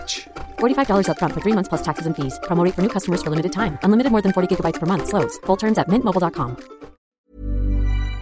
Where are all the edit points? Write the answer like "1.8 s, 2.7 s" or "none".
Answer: 7.3 s